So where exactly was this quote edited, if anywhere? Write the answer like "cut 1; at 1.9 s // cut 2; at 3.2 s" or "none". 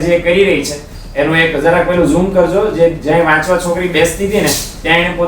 none